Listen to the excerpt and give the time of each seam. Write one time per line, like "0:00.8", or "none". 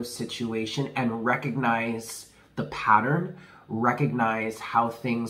none